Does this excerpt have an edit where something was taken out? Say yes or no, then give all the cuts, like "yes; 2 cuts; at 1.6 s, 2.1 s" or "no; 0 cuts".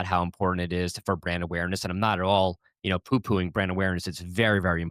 no; 0 cuts